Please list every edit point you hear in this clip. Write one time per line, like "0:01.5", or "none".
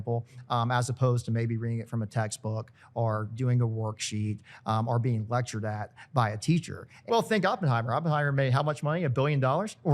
0:07.1